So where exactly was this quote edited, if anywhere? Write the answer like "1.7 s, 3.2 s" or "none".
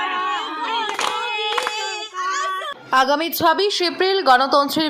3.0 s